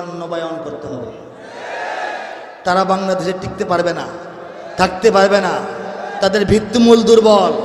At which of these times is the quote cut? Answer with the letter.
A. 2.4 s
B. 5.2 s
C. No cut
A